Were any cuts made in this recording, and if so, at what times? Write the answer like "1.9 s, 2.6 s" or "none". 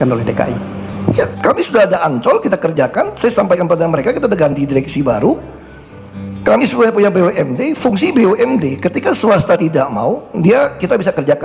none